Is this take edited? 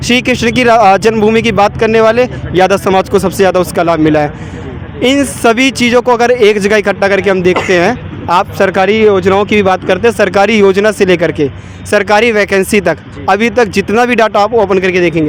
no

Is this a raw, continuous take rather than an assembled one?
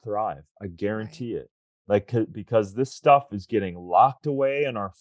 yes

